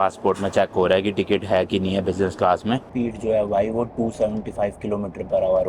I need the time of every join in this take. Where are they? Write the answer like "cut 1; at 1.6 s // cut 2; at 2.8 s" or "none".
cut 1; at 2.9 s